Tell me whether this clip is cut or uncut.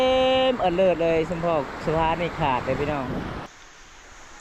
cut